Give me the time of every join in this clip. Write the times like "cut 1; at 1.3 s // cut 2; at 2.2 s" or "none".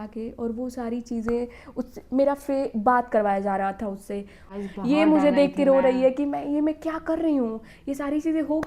cut 1; at 4.4 s